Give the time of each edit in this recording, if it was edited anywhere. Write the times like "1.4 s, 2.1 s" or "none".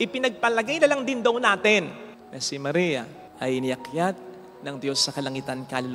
none